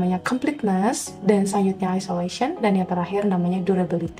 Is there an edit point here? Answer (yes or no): no